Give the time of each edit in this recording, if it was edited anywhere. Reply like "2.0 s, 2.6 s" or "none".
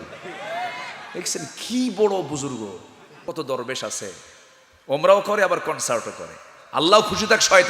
3.2 s